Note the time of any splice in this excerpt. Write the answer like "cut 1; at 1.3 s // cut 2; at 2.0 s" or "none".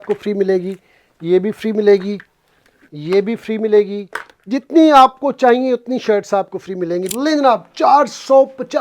cut 1; at 7.1 s